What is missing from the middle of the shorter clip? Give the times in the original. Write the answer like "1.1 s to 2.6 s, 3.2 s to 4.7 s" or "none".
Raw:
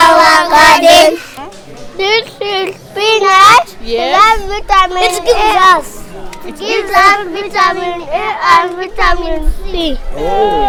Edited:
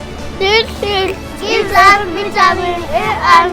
2.8 s to 6.4 s